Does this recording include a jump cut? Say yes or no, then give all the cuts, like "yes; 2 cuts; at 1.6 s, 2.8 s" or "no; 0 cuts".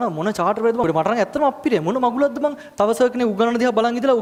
no; 0 cuts